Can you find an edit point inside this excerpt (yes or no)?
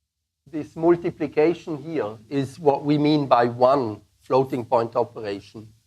yes